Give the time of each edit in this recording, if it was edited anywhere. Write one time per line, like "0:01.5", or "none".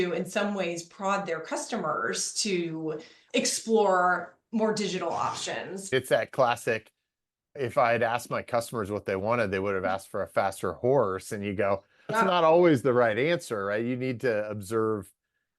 0:05.8